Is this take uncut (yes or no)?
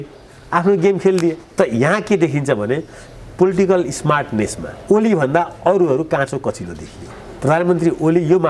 no